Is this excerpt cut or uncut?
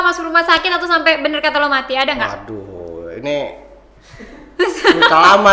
uncut